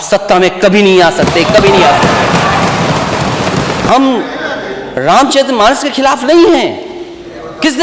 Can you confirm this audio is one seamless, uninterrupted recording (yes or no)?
no